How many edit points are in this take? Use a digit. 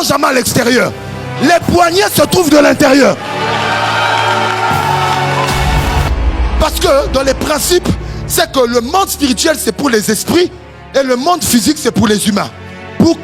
1